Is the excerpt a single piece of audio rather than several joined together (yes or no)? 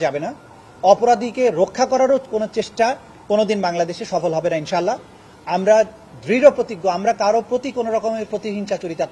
yes